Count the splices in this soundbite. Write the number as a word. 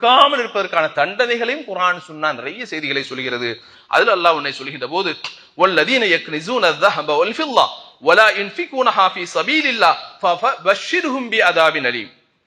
zero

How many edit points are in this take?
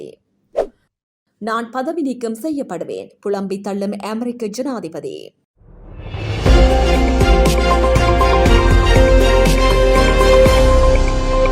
one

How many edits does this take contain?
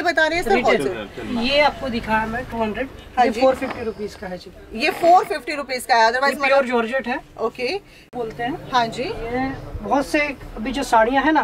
one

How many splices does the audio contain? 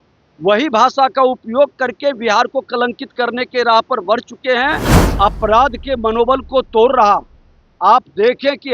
one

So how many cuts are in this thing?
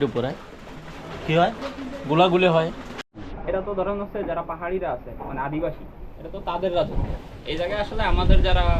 one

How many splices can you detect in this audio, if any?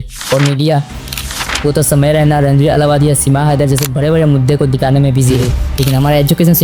one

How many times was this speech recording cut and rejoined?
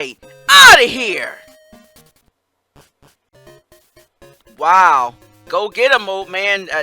one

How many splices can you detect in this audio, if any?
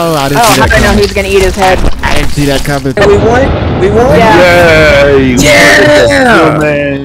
one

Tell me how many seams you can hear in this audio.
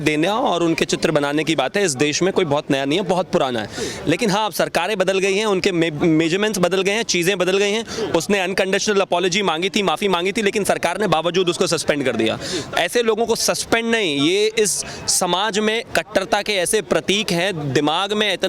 zero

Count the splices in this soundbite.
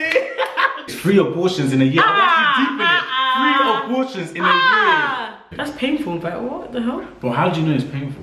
two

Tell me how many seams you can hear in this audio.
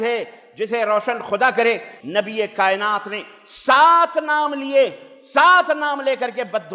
one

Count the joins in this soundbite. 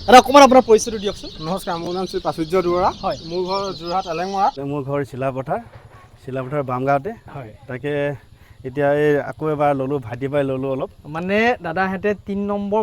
two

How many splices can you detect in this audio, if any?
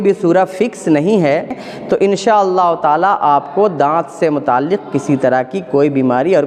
one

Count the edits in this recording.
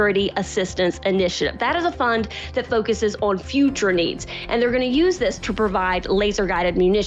zero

